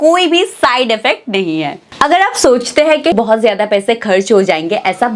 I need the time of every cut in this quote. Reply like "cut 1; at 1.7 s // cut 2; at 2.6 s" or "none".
cut 1; at 1.8 s // cut 2; at 3.1 s

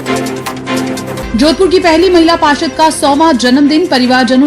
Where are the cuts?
cut 1; at 1.0 s

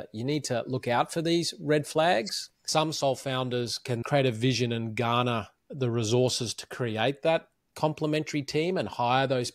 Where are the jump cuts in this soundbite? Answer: cut 1; at 2.6 s // cut 2; at 4.0 s

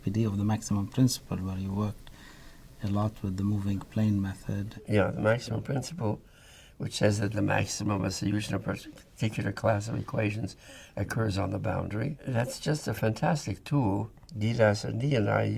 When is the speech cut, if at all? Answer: cut 1; at 4.7 s // cut 2; at 12.2 s // cut 3; at 14.2 s

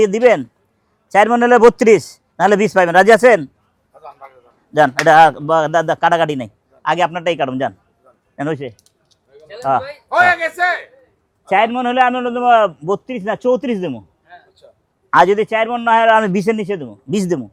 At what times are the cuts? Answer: none

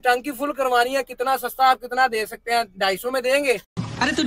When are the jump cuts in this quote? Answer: none

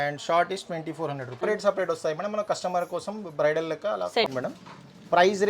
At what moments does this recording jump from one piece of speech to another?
cut 1; at 1.4 s // cut 2; at 4.3 s

